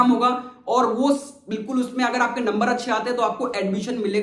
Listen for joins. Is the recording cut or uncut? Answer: uncut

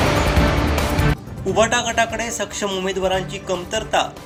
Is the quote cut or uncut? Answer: uncut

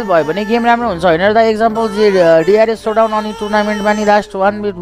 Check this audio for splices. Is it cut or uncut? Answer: uncut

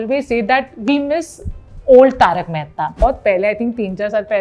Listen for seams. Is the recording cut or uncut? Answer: cut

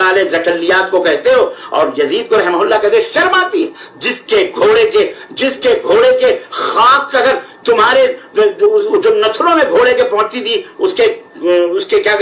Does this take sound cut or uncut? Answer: uncut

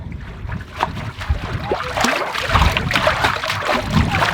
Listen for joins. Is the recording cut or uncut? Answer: cut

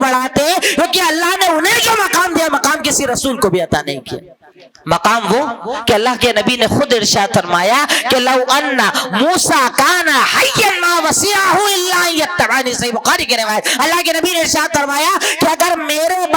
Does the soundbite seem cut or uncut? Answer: uncut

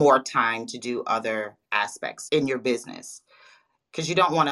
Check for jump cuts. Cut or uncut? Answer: cut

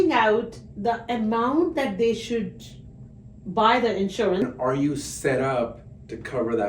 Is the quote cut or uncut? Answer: cut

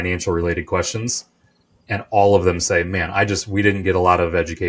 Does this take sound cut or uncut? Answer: cut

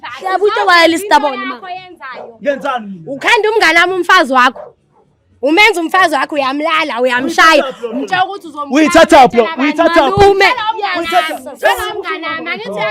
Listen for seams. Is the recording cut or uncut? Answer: uncut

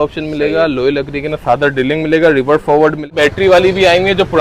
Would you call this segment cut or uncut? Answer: cut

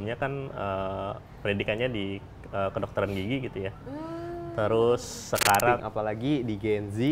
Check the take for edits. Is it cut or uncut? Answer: cut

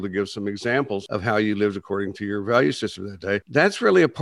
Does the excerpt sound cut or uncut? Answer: cut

